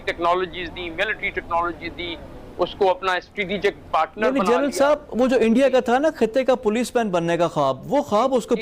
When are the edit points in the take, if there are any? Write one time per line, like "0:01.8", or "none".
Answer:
none